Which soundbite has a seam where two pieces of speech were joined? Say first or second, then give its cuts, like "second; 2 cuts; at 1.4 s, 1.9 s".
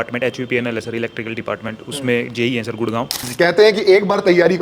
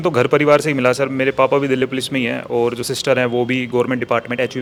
first; 1 cut; at 3.2 s